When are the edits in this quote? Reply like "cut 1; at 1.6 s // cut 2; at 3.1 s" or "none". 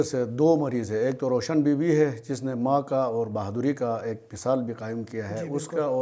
none